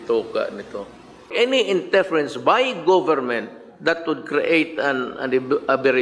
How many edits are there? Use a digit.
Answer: 1